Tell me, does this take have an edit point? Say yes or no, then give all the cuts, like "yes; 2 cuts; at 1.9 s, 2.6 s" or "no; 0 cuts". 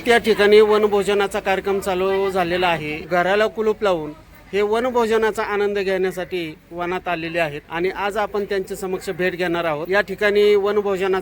yes; 3 cuts; at 2.9 s, 7.6 s, 9.9 s